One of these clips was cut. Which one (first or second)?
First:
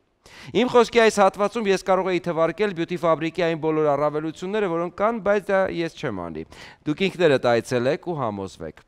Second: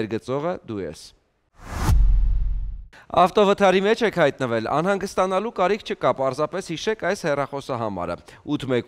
second